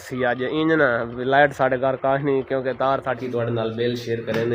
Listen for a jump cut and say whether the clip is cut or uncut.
cut